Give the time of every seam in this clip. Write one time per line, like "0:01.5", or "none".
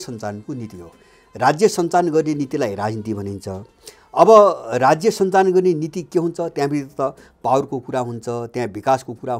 none